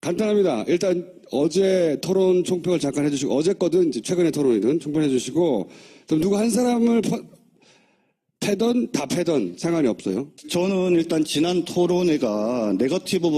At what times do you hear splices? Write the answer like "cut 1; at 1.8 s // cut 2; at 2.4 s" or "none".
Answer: cut 1; at 4.8 s